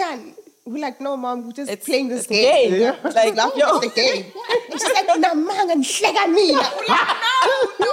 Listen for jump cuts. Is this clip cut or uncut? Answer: uncut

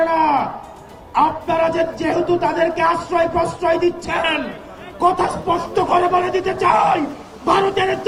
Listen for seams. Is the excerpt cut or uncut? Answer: uncut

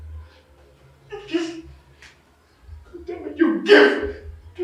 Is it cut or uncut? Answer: uncut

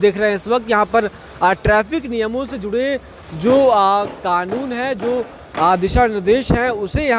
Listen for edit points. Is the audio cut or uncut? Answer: uncut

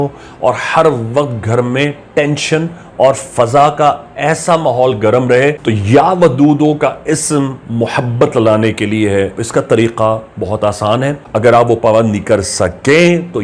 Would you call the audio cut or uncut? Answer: cut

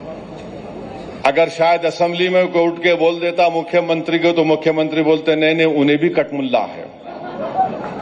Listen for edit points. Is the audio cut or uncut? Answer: uncut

